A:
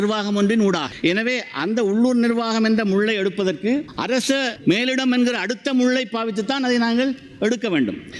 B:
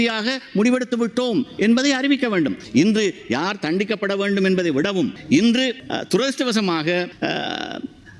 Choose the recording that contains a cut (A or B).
B